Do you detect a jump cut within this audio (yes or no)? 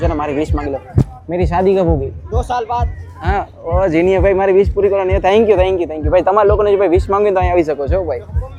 no